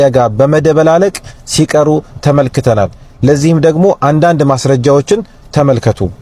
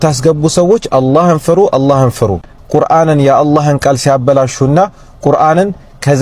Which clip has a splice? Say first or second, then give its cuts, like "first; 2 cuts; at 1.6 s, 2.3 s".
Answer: second; 1 cut; at 2.5 s